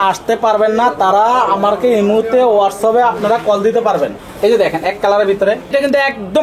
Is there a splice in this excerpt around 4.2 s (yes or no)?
yes